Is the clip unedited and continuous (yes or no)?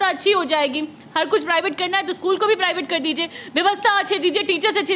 yes